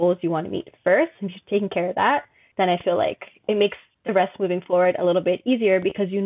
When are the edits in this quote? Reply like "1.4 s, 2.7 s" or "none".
2.4 s, 3.9 s